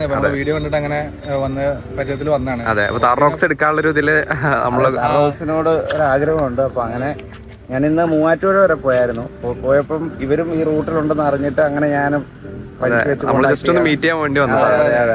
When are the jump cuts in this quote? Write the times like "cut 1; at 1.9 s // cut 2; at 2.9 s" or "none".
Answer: none